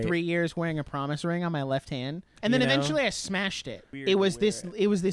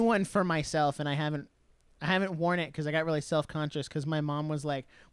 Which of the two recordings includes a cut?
first; 2 cuts; at 2.3 s, 4.0 s

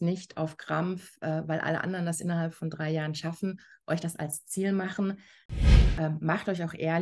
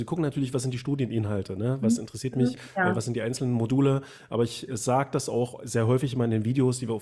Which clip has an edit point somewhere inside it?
first; 1 cut; at 5.7 s

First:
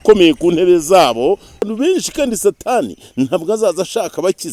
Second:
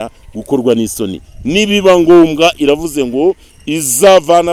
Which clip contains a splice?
first; 1 cut; at 1.7 s

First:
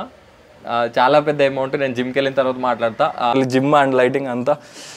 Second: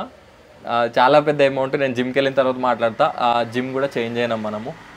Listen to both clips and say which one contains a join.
first; 1 cut; at 3.3 s

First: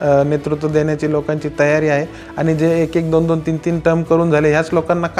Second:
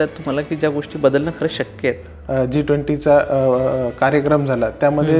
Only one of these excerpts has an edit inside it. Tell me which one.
second; 1 cut; at 2.1 s

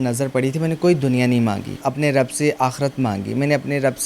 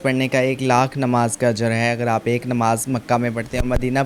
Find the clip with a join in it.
first; 1 cut; at 1.8 s

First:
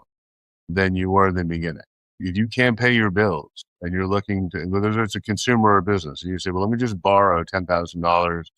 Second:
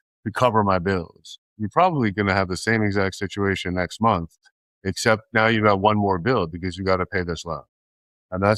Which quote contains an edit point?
first; 1 cut; at 2.2 s

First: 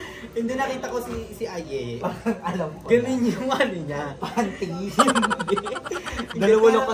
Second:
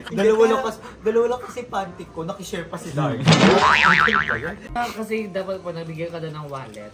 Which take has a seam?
second; 1 cut; at 4.7 s

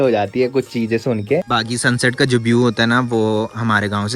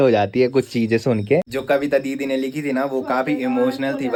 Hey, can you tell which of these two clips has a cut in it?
first; 1 cut; at 1.5 s

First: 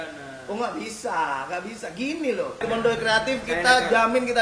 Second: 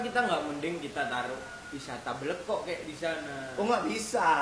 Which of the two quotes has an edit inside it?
first; 1 cut; at 2.6 s

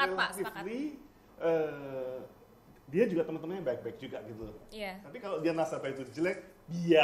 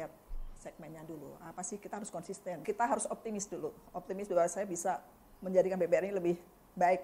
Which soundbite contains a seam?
second; 1 cut; at 2.6 s

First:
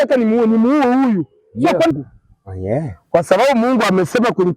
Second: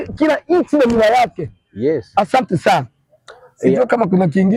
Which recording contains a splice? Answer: first; 1 cut; at 1.9 s

